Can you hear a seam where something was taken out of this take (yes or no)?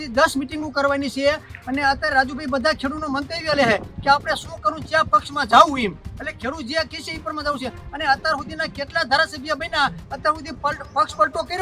no